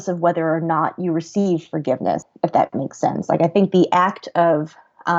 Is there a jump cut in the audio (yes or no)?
yes